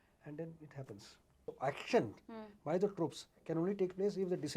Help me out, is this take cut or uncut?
cut